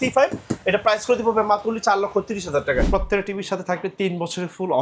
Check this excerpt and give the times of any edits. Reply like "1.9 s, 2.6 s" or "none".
2.9 s